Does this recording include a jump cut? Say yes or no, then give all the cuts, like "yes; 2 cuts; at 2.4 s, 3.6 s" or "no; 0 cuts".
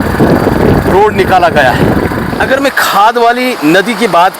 yes; 1 cut; at 2.3 s